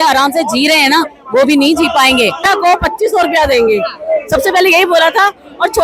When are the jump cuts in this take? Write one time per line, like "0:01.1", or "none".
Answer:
0:02.4